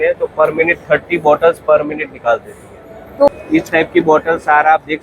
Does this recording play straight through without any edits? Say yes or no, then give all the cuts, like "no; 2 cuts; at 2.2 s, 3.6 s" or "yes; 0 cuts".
no; 1 cut; at 3.3 s